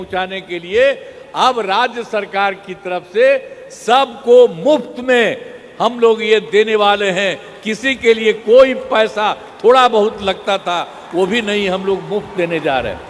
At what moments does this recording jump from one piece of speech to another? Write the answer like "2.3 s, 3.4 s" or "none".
none